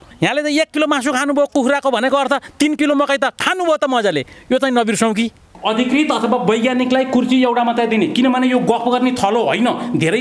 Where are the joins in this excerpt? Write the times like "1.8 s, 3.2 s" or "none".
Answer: 5.4 s